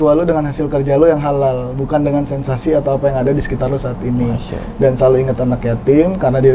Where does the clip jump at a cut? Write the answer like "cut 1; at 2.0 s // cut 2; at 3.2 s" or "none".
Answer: none